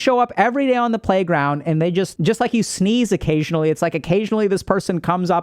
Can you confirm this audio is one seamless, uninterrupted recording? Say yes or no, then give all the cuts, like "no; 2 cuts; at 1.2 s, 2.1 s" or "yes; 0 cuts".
no; 1 cut; at 2.1 s